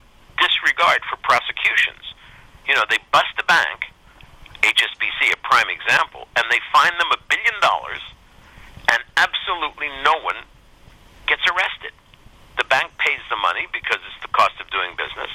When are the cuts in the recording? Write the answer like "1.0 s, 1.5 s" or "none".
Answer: none